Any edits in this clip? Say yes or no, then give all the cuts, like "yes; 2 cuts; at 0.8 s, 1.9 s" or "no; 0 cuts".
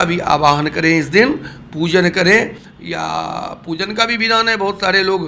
no; 0 cuts